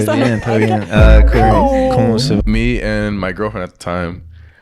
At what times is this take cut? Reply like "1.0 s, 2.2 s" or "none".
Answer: 2.4 s